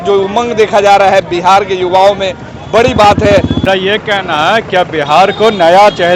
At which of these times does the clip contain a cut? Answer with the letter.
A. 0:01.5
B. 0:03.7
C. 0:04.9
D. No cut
B